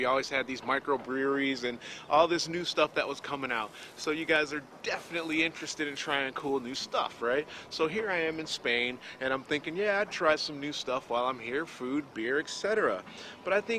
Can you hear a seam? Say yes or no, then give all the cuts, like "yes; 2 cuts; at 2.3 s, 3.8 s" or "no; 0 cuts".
yes; 1 cut; at 8.3 s